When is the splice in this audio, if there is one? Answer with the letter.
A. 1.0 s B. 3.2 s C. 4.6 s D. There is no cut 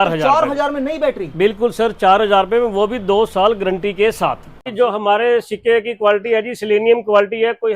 C